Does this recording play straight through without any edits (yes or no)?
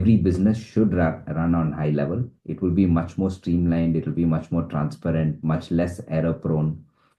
yes